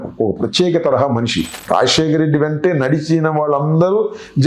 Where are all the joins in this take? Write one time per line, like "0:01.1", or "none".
0:01.5